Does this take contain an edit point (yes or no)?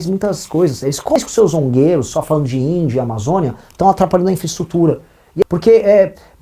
yes